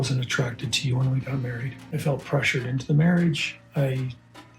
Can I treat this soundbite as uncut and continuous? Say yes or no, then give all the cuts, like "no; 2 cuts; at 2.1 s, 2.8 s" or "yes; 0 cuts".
no; 1 cut; at 1.8 s